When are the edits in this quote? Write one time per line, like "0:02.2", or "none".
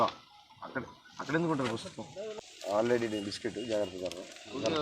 0:02.3